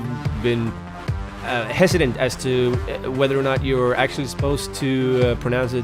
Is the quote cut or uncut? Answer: uncut